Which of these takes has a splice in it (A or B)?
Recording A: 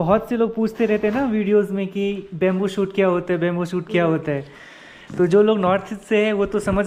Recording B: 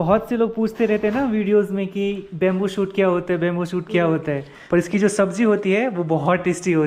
B